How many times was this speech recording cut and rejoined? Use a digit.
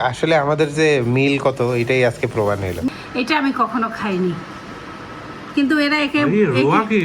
1